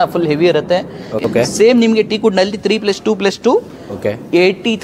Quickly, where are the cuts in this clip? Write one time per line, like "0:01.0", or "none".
0:01.2